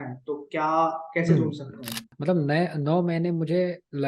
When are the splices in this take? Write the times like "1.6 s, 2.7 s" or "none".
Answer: 2.1 s